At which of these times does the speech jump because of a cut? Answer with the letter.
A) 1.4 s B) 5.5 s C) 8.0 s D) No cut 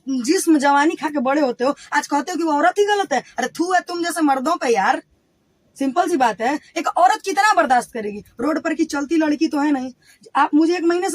D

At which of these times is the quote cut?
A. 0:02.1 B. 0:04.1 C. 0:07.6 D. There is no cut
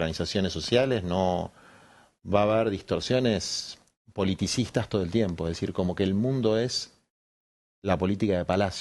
D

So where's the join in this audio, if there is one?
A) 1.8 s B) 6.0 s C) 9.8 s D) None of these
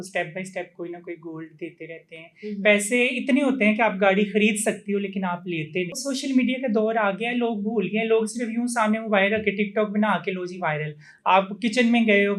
B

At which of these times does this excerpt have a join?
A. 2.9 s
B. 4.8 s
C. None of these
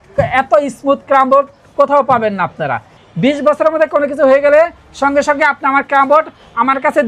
A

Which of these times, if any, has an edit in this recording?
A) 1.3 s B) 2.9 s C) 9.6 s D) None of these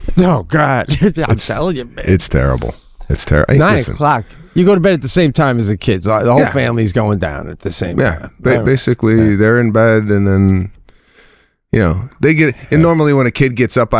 D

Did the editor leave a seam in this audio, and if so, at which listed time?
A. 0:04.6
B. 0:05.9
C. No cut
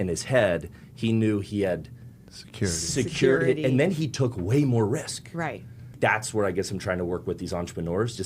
B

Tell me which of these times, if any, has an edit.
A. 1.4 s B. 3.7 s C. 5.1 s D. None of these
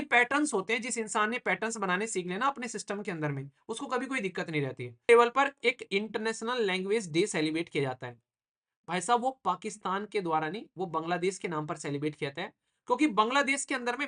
C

